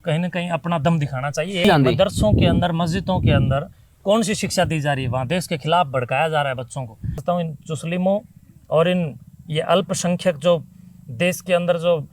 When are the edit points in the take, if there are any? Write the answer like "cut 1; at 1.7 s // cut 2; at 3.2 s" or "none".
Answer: cut 1; at 1.6 s // cut 2; at 7.2 s